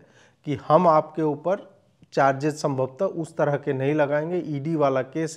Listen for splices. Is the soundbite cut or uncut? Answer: uncut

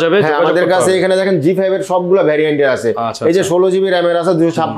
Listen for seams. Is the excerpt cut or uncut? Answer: uncut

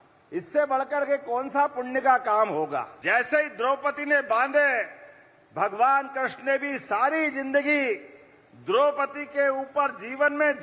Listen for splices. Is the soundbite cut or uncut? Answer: cut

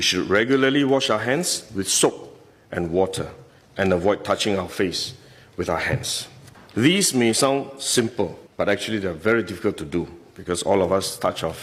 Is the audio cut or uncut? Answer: uncut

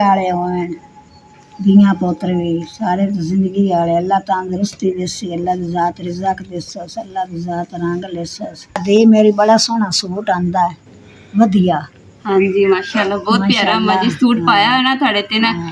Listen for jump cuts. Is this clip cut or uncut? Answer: uncut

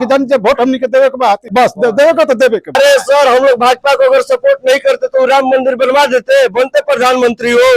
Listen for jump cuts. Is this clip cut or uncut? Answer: cut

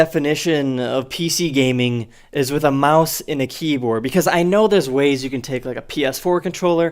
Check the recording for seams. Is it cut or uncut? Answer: cut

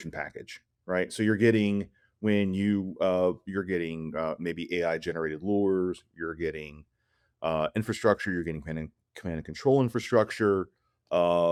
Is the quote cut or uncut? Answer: uncut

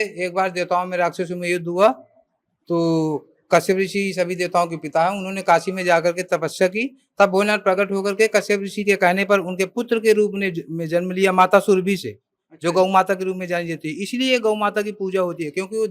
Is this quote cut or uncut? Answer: uncut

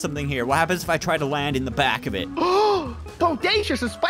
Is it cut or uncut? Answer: uncut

